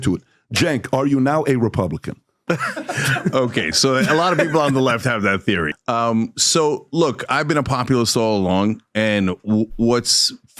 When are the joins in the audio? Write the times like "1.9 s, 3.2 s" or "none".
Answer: 5.7 s